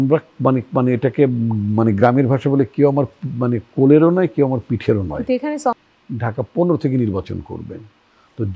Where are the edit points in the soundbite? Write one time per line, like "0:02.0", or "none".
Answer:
0:05.8